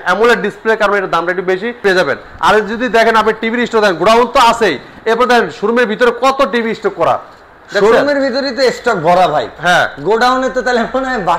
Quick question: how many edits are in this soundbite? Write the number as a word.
one